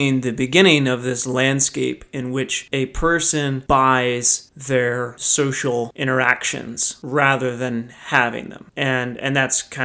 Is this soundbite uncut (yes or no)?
yes